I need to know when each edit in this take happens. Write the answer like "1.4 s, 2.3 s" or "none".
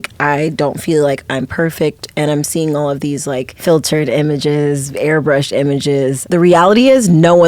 3.5 s, 6.2 s